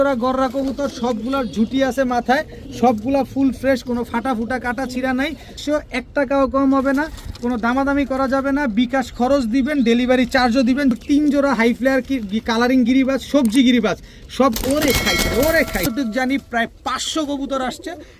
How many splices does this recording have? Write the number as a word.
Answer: three